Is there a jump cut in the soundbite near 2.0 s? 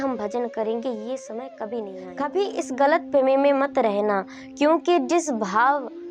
yes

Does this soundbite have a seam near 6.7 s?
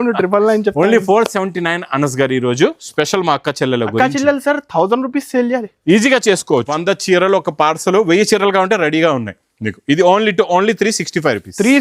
yes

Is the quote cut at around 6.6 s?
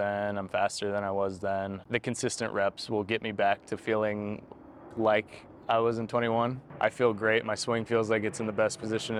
yes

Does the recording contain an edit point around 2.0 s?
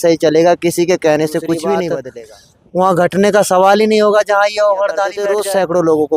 yes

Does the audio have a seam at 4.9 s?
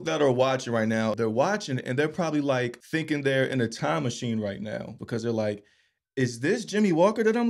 yes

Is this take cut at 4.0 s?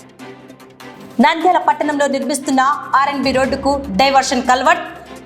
no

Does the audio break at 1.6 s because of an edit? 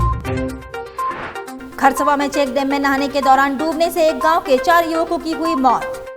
yes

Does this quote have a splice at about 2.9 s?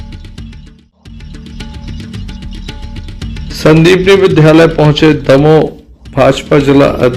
yes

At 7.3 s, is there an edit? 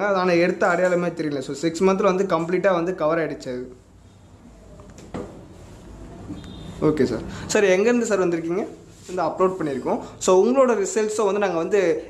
no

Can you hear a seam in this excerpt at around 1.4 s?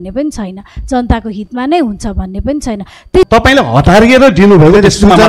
no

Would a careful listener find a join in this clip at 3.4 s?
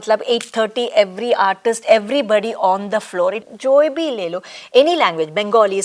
yes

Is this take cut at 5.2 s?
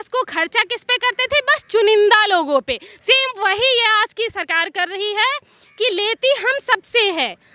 no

